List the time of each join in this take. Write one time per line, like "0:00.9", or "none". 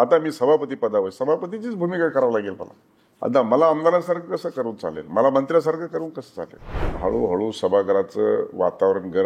0:06.9